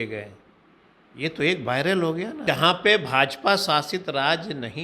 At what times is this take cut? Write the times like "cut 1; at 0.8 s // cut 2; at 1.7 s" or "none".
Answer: cut 1; at 2.4 s